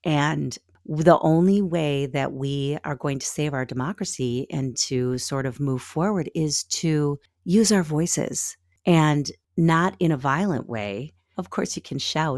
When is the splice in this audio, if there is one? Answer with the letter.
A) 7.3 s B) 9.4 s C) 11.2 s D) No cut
C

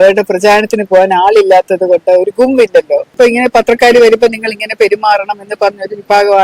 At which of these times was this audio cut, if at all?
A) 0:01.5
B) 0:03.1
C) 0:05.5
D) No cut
B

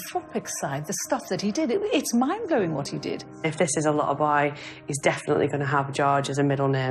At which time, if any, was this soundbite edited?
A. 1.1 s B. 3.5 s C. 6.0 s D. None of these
B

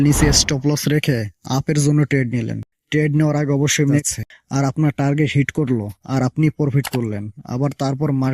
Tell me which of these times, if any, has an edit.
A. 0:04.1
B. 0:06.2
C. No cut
A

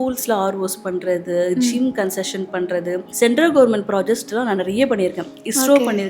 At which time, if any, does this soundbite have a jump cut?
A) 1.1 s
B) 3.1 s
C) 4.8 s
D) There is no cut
B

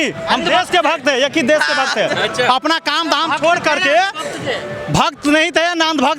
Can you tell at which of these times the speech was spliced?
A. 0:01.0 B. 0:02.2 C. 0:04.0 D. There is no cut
D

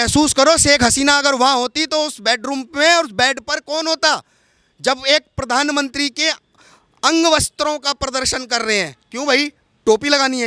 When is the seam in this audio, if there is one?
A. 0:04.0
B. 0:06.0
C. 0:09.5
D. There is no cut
D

